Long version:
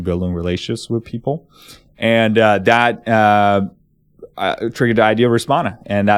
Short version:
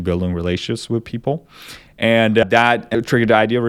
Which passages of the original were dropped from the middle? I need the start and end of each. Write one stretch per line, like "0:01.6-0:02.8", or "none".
0:02.4-0:04.1